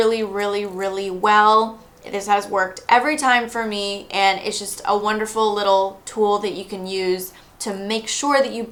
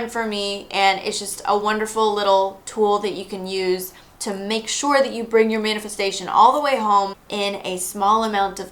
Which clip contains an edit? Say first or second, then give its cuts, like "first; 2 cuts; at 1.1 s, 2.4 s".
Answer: second; 1 cut; at 7.2 s